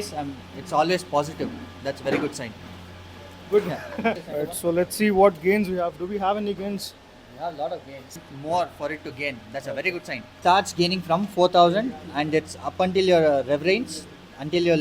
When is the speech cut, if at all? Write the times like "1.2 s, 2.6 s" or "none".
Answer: 4.4 s, 8.1 s, 10.3 s